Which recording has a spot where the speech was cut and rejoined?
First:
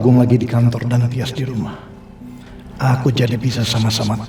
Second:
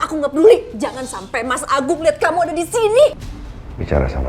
second; 1 cut; at 3.3 s

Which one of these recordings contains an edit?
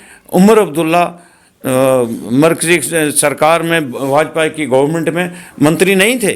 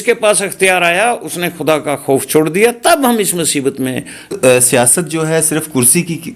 second; 1 cut; at 4.3 s

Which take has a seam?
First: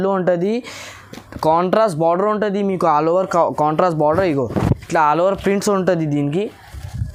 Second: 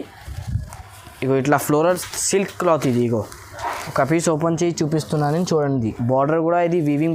second; 1 cut; at 1.8 s

